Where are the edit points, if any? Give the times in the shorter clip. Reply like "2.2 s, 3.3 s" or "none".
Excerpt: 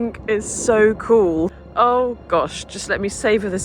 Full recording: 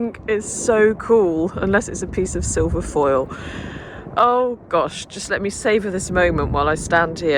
1.5 s